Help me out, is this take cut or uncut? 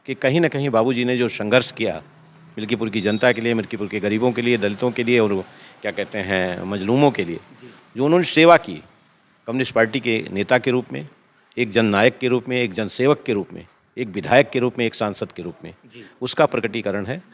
uncut